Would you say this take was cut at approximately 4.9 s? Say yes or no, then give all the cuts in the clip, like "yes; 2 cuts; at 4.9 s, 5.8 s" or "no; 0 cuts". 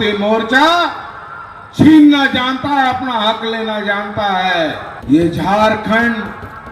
yes; 1 cut; at 4.9 s